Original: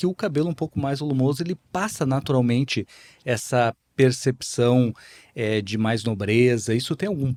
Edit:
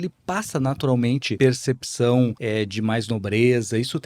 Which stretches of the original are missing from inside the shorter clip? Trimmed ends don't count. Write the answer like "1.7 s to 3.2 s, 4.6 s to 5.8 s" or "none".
2.8 s to 3.9 s, 5.0 s to 5.3 s